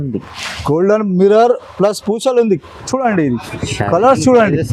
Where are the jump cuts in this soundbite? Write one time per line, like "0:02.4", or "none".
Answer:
0:02.7